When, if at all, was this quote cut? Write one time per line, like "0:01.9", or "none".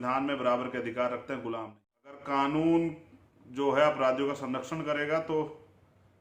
0:02.2

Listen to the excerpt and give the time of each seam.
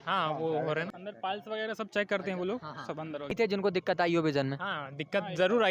0:01.0
0:03.3

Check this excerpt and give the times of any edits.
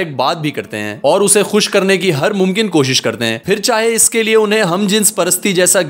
none

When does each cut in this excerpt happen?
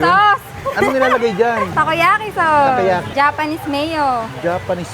0:01.7
0:03.1

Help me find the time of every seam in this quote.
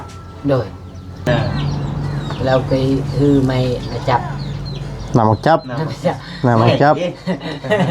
0:01.3

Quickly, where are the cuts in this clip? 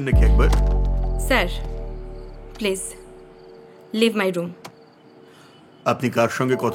none

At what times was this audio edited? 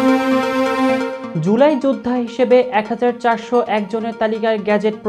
0:01.2

